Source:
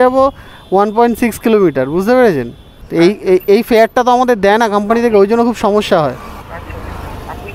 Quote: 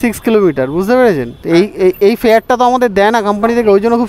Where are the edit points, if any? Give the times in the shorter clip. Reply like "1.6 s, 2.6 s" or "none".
1.3 s